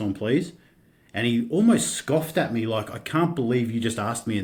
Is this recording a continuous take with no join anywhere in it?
yes; 0 cuts

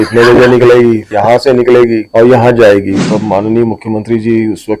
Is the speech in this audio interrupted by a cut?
yes; 3 cuts; at 1.1 s, 2.1 s, 3.0 s

